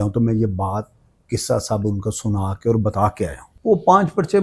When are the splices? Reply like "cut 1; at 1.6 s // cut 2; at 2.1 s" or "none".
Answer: cut 1; at 3.5 s